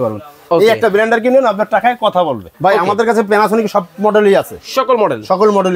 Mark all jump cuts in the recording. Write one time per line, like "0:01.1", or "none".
0:02.4